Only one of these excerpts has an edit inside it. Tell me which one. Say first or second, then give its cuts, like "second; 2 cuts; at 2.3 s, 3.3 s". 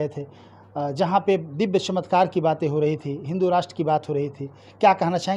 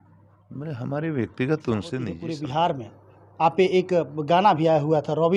second; 1 cut; at 2.2 s